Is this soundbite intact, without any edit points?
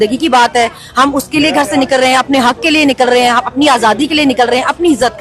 yes; 0 cuts

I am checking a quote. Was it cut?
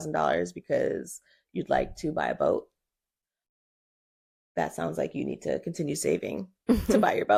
no; 0 cuts

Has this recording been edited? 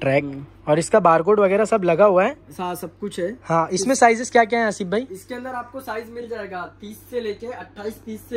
no; 0 cuts

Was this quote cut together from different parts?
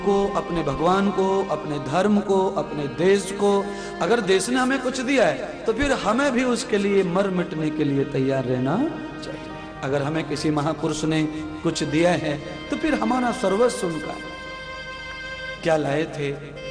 no; 0 cuts

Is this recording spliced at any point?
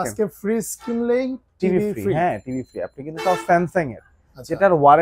no; 0 cuts

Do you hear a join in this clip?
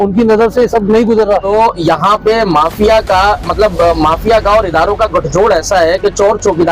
yes; 1 cut; at 1.4 s

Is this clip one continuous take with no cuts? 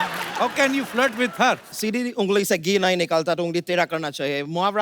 no; 1 cut; at 1.7 s

